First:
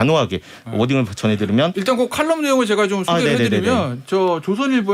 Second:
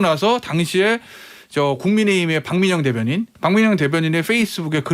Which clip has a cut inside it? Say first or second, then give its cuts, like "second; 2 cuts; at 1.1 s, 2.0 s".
second; 1 cut; at 3.3 s